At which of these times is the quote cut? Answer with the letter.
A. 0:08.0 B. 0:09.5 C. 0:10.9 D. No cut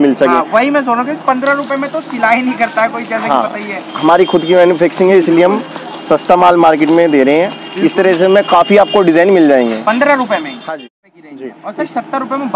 C